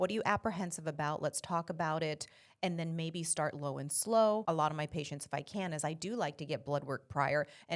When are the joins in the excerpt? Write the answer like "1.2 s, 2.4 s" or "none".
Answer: 4.4 s